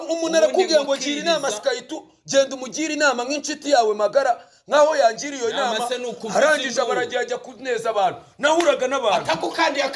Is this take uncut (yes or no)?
yes